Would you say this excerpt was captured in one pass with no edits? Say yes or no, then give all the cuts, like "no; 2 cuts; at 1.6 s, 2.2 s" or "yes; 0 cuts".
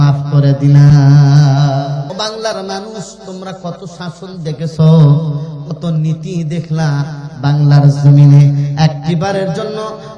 no; 1 cut; at 2.1 s